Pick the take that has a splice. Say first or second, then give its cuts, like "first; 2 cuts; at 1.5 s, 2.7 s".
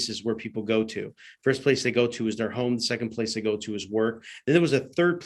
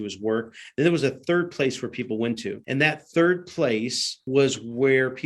second; 2 cuts; at 2.6 s, 4.3 s